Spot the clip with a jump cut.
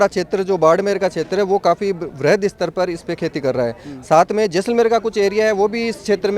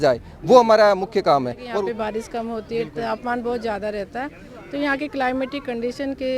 second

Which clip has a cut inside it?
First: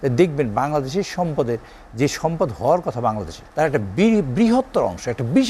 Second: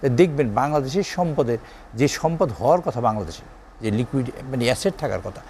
first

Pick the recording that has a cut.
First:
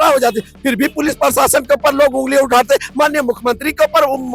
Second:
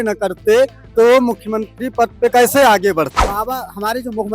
second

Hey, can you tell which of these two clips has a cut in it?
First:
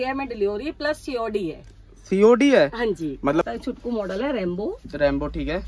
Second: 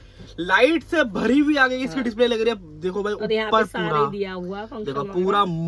first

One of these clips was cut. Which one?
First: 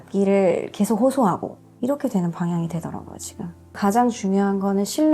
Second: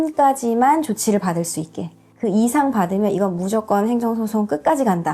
first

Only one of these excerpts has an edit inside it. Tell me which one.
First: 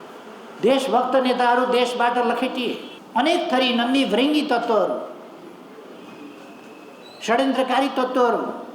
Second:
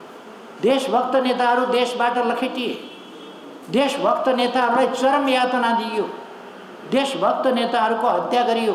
first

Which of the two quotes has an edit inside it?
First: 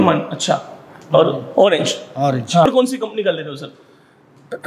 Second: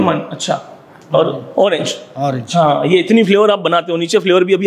first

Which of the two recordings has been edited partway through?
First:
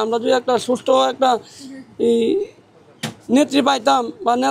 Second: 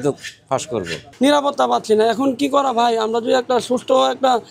second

